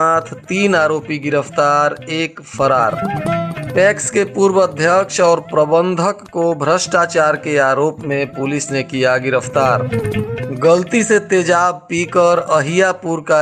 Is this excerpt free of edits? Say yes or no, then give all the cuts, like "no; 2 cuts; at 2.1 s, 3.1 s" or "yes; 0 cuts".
yes; 0 cuts